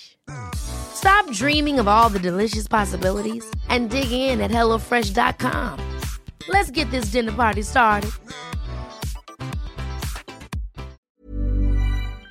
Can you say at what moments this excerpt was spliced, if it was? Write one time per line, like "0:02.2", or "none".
0:11.0